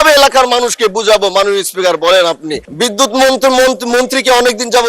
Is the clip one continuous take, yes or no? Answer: yes